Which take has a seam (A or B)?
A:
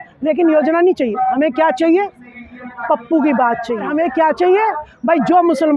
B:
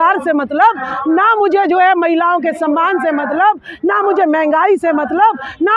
A